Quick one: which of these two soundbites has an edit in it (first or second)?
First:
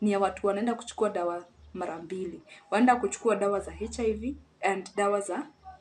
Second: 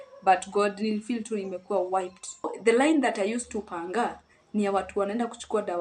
second